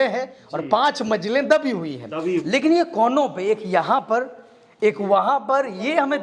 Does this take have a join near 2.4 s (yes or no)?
yes